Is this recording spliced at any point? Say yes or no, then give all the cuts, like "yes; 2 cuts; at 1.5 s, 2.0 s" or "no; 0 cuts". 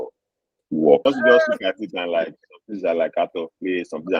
yes; 1 cut; at 1.0 s